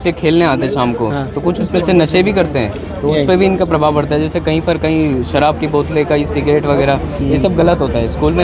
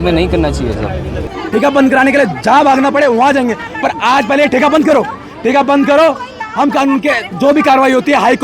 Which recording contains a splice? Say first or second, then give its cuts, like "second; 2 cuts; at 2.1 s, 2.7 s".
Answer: second; 1 cut; at 1.3 s